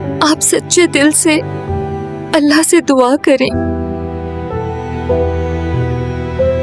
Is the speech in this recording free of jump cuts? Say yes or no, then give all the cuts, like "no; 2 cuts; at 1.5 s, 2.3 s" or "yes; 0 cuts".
yes; 0 cuts